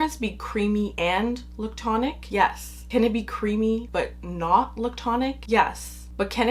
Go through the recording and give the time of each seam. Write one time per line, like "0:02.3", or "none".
0:00.9
0:02.2
0:03.9
0:05.4

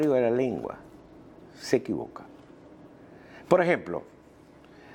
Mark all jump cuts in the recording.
0:02.8

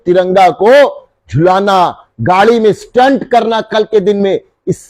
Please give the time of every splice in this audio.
none

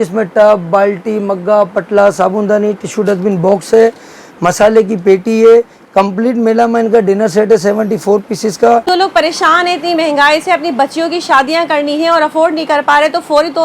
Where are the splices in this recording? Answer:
0:08.8

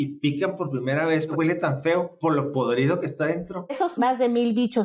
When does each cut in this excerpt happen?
0:01.3
0:03.7

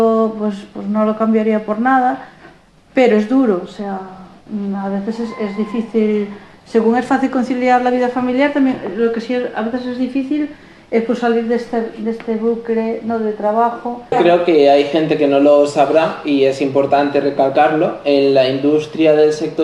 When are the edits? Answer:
0:14.1

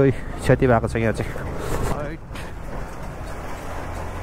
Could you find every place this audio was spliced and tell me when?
0:01.9

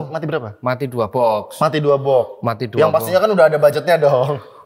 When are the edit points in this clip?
none

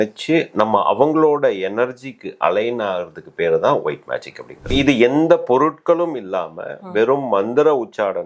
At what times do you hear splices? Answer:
0:04.7

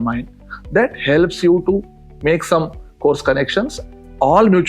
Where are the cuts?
0:03.8

